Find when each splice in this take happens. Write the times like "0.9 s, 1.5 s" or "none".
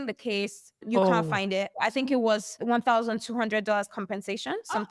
0.8 s, 1.7 s, 2.5 s